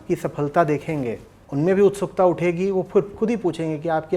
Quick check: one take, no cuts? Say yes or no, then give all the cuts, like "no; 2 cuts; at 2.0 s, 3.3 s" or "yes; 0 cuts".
no; 1 cut; at 1.4 s